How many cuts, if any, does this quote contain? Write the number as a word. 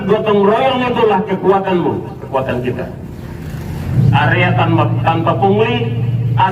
one